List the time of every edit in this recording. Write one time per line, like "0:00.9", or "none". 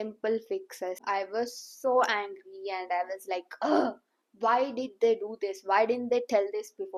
0:01.0